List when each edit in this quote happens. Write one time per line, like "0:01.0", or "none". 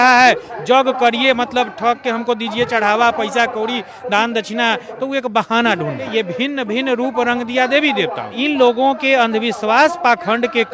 0:06.1
0:08.4